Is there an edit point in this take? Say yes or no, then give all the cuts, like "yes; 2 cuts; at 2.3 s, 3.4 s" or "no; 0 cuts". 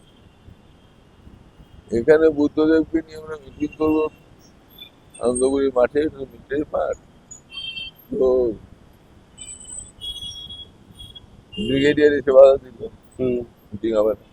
no; 0 cuts